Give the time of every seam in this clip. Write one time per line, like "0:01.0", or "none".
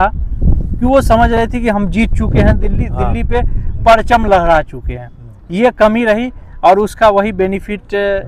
none